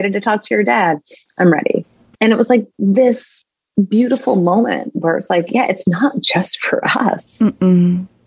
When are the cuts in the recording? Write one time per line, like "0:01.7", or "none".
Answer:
0:02.0